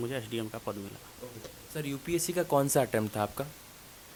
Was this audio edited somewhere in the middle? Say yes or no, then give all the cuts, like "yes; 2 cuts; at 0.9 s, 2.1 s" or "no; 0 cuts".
no; 0 cuts